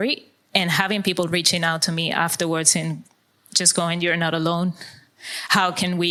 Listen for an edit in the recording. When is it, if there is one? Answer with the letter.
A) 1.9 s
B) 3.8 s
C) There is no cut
C